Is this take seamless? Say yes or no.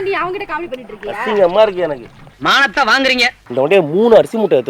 no